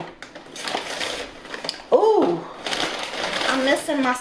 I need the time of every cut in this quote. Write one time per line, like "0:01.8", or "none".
none